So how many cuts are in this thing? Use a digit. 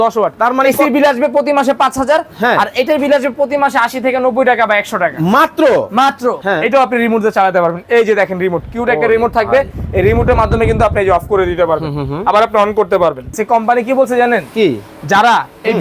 2